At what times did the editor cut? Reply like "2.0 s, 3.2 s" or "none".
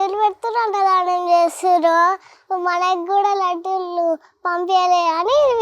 none